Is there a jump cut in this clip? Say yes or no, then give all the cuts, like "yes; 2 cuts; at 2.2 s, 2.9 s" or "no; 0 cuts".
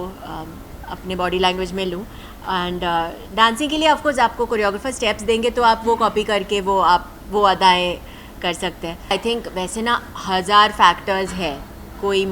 yes; 1 cut; at 9.1 s